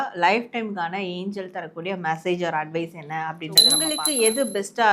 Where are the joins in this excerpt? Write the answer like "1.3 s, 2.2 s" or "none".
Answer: 3.8 s

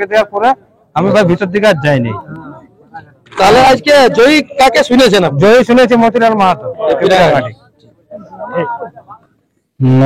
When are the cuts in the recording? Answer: none

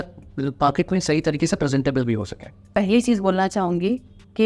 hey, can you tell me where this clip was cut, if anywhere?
2.7 s

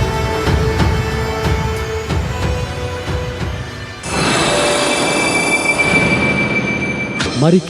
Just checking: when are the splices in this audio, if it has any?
4.0 s

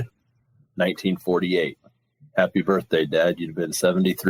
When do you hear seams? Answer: none

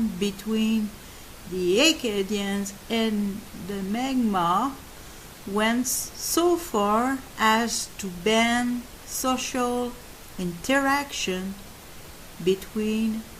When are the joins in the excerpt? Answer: 9.8 s

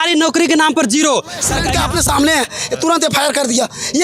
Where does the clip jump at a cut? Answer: 1.7 s

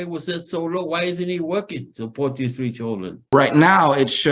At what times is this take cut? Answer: 3.3 s

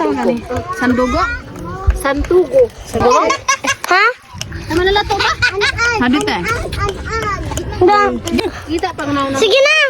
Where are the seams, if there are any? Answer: 3.0 s, 8.4 s

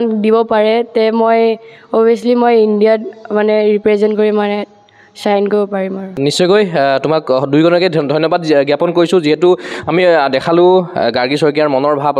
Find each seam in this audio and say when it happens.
none

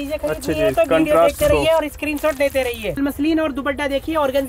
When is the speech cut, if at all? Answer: 3.0 s

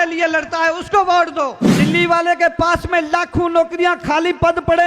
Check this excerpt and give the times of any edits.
1.7 s

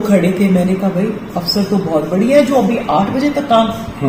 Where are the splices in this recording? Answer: none

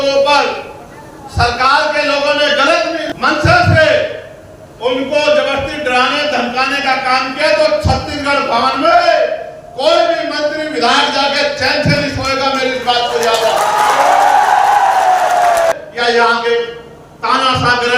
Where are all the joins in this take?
3.1 s, 15.7 s

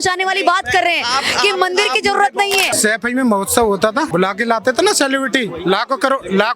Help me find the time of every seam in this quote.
2.7 s, 4.1 s

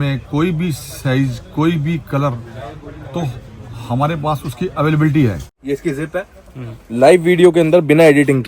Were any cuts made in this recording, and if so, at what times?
5.4 s

